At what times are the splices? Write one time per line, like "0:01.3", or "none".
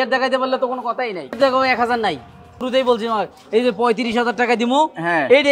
0:01.4
0:02.5